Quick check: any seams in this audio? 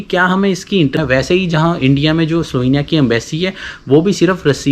yes; 1 cut; at 1.0 s

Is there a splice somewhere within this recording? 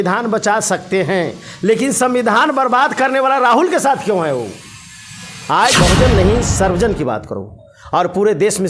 yes; 1 cut; at 5.7 s

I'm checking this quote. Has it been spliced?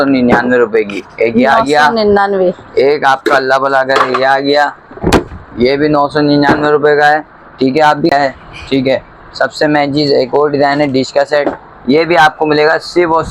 yes; 1 cut; at 8.1 s

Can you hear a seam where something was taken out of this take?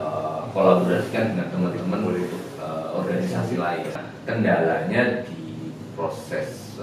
yes; 1 cut; at 4.0 s

